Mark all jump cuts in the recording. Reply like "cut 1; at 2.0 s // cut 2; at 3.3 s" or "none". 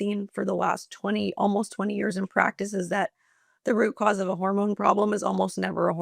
none